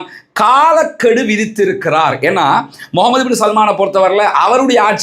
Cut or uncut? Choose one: uncut